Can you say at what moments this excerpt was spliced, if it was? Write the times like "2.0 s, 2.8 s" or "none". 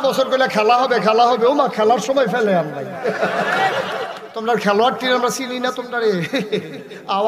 4.2 s